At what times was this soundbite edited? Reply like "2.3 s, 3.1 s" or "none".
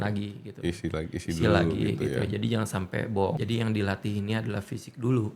3.4 s